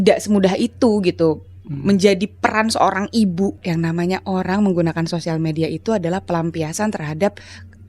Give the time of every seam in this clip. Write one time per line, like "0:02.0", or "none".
0:03.6